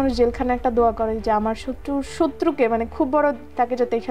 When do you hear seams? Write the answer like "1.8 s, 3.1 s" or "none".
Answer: none